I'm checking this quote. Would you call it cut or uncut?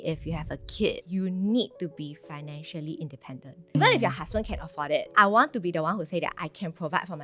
cut